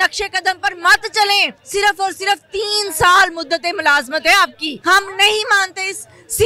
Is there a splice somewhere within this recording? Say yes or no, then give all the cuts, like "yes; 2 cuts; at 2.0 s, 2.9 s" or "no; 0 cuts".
yes; 2 cuts; at 1.6 s, 4.7 s